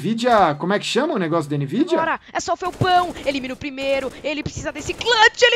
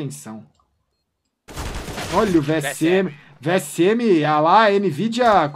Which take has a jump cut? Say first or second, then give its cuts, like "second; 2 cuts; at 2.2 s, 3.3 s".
first; 1 cut; at 2.0 s